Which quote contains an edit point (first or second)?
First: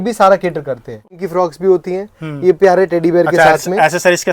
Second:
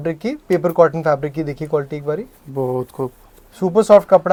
first